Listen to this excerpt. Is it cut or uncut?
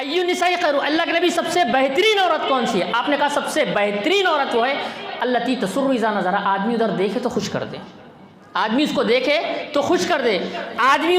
uncut